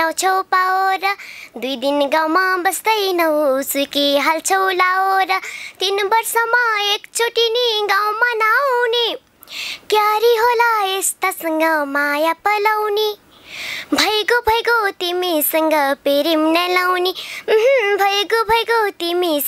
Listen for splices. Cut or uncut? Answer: uncut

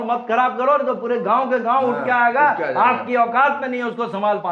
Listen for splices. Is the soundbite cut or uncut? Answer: uncut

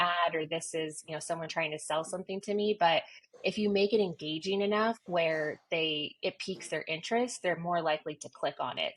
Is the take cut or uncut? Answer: uncut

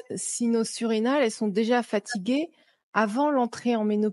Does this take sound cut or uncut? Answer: uncut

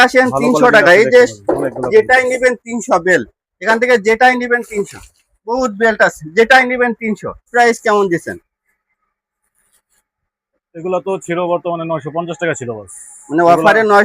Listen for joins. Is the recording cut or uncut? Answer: cut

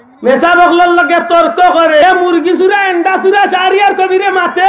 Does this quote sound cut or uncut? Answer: cut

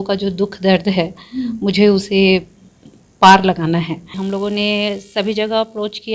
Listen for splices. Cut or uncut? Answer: cut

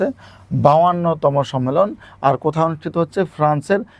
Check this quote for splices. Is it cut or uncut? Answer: uncut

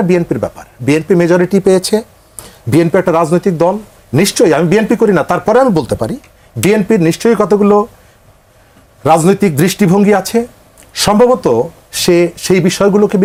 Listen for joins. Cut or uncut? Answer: uncut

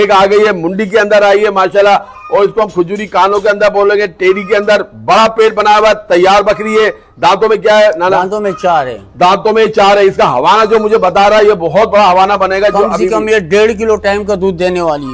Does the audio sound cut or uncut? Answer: uncut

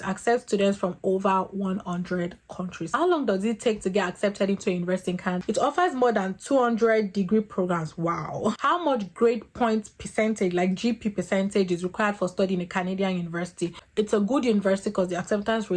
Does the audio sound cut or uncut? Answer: cut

